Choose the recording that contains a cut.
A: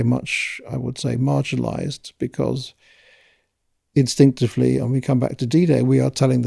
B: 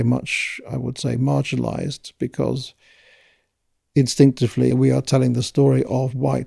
B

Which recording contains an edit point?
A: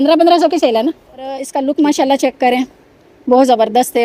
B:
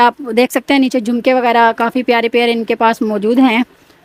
A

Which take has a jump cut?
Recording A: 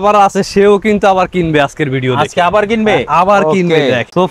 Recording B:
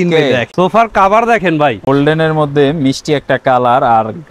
B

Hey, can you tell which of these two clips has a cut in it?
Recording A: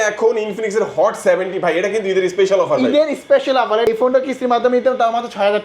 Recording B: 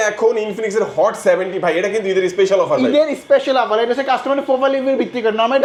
A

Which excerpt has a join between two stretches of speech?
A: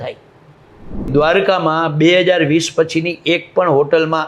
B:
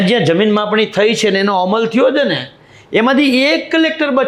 A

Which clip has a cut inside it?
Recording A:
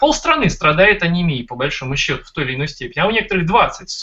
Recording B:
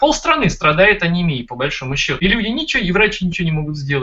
B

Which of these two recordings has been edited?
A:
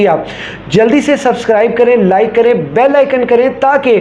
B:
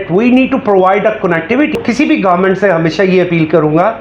B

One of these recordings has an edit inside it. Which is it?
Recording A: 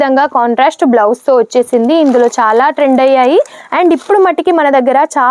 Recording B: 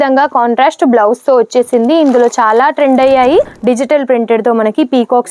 B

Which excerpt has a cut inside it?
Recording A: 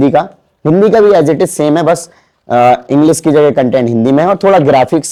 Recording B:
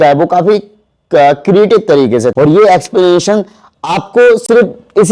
B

